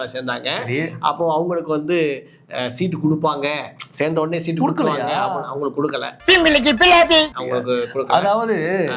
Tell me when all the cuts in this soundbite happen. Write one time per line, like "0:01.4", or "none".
none